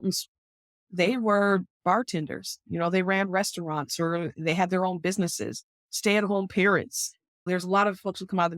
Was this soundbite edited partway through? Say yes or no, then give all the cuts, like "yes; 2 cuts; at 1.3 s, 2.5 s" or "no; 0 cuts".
yes; 1 cut; at 7.4 s